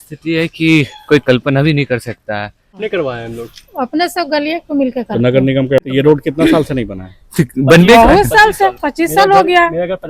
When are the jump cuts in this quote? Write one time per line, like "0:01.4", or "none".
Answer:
0:02.8
0:05.9